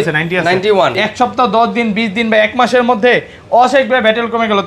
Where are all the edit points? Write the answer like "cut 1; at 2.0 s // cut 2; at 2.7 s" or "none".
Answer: cut 1; at 1.0 s